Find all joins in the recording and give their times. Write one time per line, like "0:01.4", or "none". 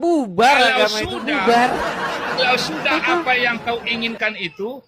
none